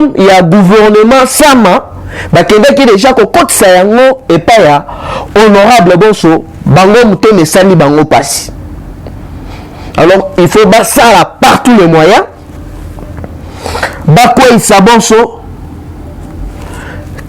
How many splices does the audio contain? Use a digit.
0